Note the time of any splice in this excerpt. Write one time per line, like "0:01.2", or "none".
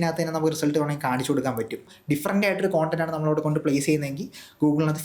0:01.9